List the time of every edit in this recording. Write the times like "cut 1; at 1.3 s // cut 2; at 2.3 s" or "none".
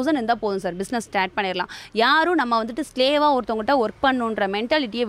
none